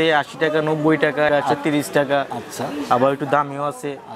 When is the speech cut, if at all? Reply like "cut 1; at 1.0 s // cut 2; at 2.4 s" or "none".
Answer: cut 1; at 1.3 s